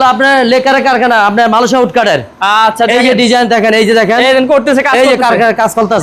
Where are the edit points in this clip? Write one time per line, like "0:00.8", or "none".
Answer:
none